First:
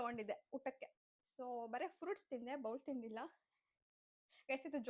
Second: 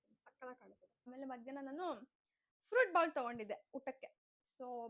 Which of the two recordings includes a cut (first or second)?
second